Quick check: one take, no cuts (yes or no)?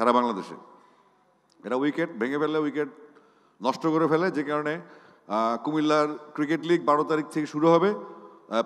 yes